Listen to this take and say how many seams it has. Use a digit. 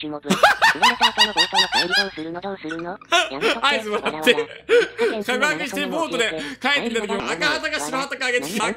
0